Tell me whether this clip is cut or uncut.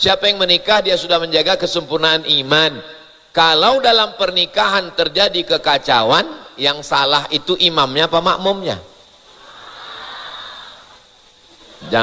uncut